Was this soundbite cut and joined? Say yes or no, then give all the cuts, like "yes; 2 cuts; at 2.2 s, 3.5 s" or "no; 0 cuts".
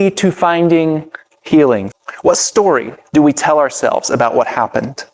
yes; 1 cut; at 1.9 s